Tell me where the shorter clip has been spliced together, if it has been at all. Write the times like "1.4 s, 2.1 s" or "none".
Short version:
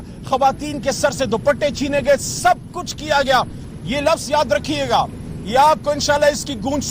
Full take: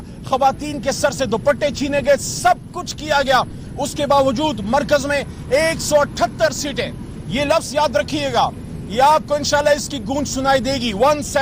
3.6 s

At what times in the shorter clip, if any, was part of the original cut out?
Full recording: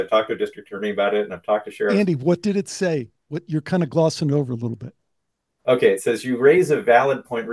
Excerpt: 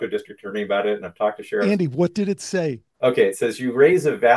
2.8 s

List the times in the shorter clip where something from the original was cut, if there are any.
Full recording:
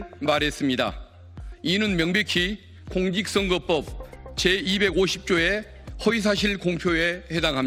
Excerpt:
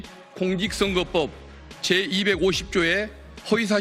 none

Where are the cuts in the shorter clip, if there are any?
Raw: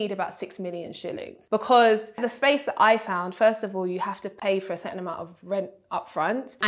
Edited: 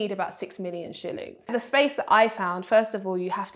1.4 s

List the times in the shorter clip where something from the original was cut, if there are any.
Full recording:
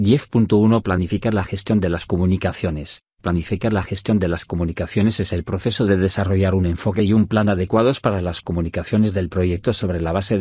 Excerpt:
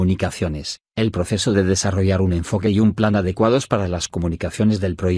1.2 s

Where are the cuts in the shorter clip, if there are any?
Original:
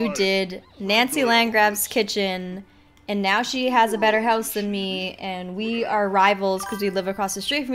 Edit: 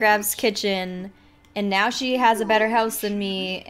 none

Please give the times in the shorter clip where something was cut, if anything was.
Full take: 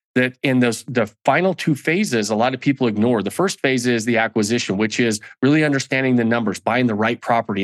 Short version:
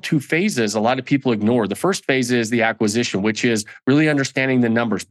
none

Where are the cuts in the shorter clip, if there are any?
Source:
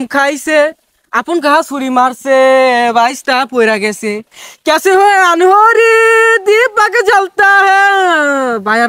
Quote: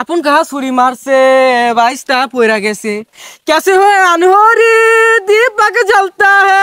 none

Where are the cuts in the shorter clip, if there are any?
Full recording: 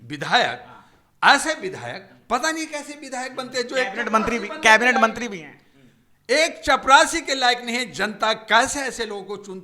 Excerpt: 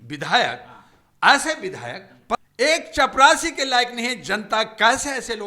2.4 s

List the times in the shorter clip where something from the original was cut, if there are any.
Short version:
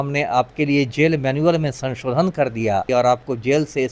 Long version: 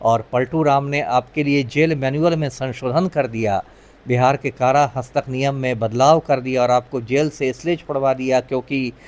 2.9 s

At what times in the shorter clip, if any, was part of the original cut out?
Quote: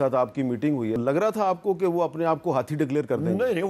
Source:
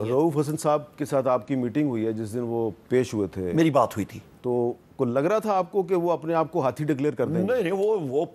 1.0 s

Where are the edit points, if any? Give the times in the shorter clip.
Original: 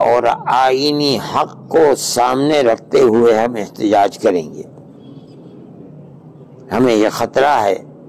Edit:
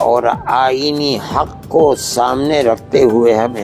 none

